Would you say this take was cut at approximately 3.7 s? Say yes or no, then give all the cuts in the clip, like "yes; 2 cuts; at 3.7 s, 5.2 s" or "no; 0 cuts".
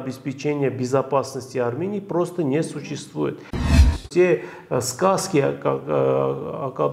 yes; 1 cut; at 3.7 s